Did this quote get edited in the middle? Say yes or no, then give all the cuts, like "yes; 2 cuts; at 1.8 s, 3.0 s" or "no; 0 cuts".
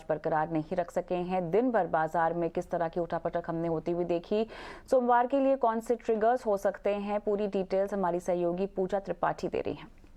no; 0 cuts